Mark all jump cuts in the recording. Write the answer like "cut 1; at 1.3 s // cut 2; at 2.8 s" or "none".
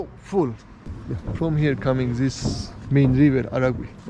cut 1; at 0.9 s